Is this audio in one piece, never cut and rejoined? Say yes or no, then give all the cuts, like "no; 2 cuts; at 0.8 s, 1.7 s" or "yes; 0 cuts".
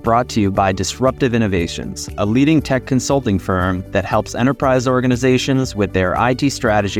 yes; 0 cuts